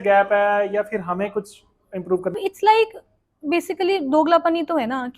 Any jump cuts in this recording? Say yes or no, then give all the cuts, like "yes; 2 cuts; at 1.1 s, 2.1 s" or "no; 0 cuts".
yes; 1 cut; at 2.3 s